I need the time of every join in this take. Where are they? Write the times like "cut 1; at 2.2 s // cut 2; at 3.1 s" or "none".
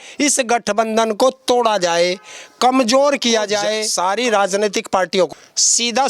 cut 1; at 3.8 s // cut 2; at 5.3 s